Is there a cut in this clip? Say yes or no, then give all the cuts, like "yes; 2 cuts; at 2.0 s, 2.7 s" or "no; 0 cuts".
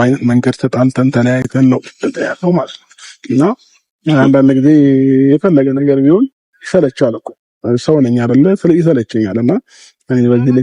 no; 0 cuts